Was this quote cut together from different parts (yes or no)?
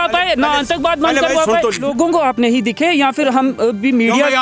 yes